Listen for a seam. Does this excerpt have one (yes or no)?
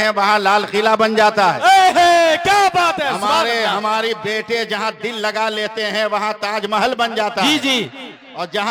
no